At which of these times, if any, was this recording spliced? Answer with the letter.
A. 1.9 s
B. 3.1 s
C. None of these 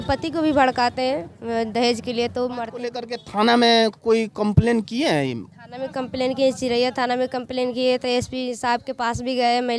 B